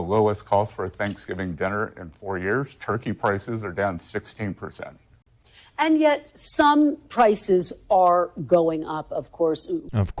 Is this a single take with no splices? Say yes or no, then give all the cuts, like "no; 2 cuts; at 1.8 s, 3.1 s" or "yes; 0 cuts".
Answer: yes; 0 cuts